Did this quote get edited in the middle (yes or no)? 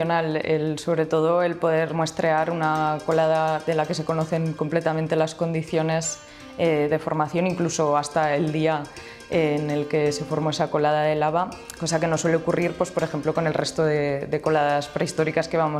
no